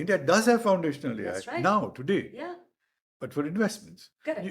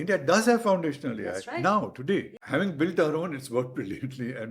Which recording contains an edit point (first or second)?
second